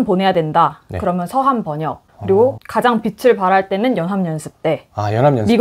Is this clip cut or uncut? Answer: uncut